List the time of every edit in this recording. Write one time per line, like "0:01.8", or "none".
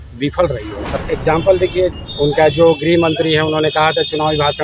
0:00.9
0:01.9